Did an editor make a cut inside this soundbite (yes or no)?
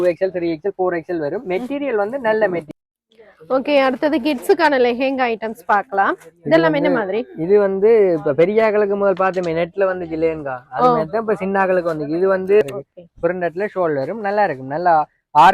yes